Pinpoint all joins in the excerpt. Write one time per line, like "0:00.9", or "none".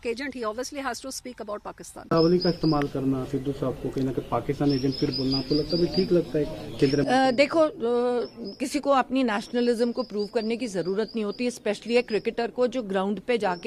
0:02.1